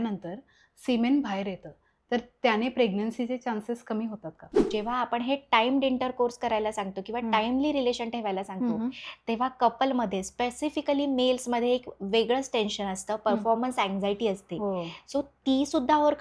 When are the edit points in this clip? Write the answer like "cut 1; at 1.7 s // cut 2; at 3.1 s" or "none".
cut 1; at 4.6 s

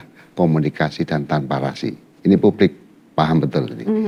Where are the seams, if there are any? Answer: none

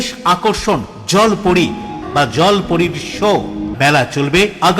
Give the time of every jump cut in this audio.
cut 1; at 2.0 s // cut 2; at 3.7 s

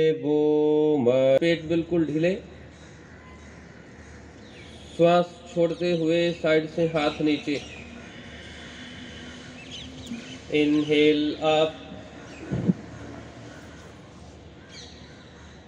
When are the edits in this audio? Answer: cut 1; at 1.4 s

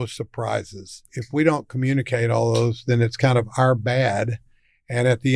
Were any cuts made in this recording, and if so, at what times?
cut 1; at 1.1 s

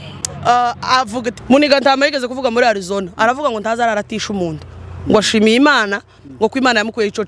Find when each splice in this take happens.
cut 1; at 1.3 s

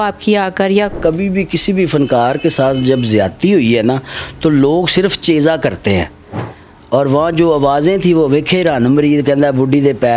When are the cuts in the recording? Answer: cut 1; at 1.0 s

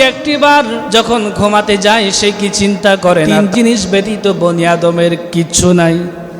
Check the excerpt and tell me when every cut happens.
cut 1; at 0.8 s // cut 2; at 3.3 s

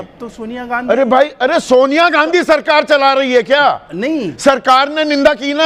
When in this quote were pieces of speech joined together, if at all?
none

